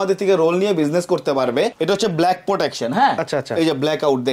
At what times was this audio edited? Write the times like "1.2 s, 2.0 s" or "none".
1.7 s